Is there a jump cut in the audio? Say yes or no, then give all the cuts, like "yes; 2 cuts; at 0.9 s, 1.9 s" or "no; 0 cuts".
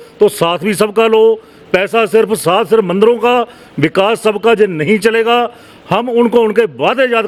no; 0 cuts